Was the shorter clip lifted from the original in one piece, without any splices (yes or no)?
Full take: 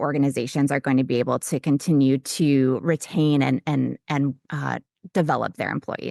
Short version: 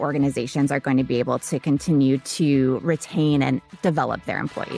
no